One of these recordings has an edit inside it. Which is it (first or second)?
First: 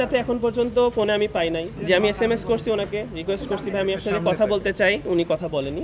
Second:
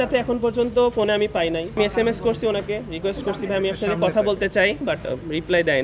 second